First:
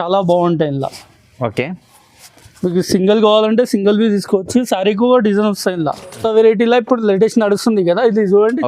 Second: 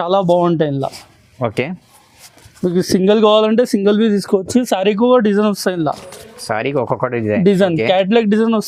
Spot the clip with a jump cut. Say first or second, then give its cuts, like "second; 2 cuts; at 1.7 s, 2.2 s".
first; 1 cut; at 6.1 s